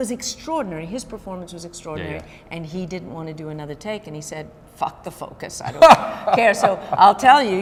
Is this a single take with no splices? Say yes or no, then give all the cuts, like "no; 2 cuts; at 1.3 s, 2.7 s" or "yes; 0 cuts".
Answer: yes; 0 cuts